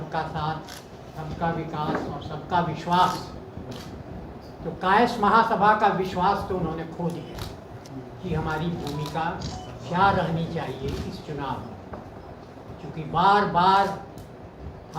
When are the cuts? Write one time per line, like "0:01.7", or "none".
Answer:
0:07.8